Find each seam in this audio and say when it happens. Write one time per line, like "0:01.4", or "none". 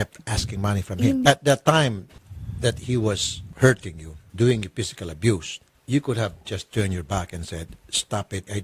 0:01.2